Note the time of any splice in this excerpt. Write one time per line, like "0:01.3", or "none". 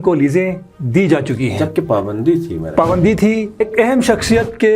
0:03.6